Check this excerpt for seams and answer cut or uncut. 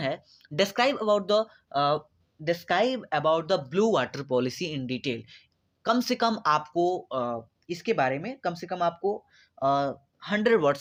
uncut